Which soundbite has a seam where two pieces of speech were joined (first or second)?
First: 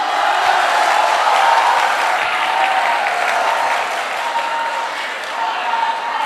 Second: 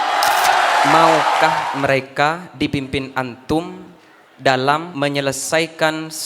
second